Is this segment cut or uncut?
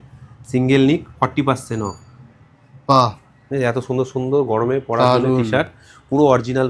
uncut